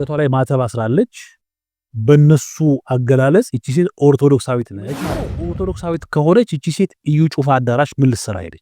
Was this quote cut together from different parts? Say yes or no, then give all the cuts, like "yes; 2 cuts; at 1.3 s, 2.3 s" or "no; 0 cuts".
yes; 1 cut; at 4.9 s